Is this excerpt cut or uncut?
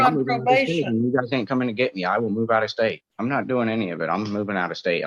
cut